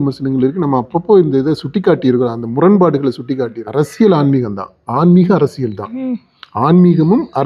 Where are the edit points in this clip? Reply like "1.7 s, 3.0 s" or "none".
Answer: 3.6 s